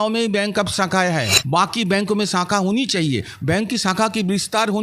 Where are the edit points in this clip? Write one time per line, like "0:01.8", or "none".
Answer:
0:01.3